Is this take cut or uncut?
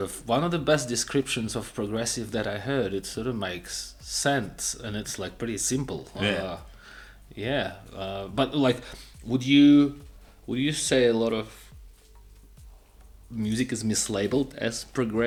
uncut